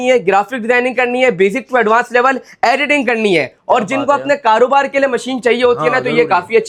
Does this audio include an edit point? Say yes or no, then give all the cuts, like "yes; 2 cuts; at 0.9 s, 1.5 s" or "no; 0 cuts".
no; 0 cuts